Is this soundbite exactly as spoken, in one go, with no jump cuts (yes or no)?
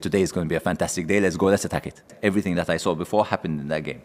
no